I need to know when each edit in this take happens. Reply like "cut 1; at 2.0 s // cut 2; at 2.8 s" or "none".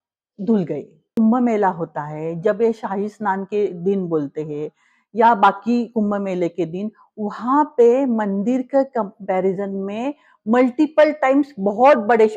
cut 1; at 1.1 s